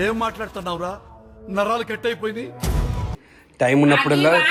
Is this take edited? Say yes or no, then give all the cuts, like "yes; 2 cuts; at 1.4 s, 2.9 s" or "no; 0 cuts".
no; 0 cuts